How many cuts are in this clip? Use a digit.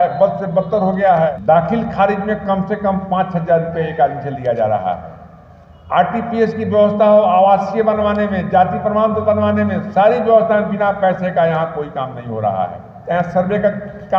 2